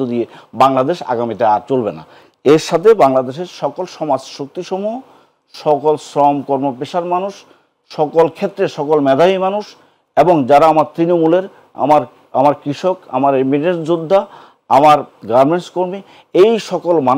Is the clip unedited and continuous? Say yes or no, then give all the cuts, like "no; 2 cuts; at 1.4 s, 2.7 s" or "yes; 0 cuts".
yes; 0 cuts